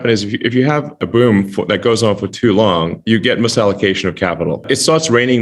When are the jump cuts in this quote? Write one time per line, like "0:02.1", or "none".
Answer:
0:01.0
0:03.0